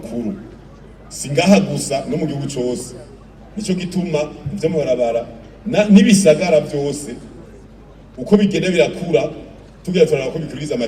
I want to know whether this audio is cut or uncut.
uncut